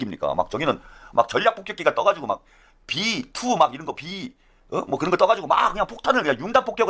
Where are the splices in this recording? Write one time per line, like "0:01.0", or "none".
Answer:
none